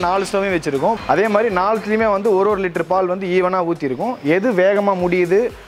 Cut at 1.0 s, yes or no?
yes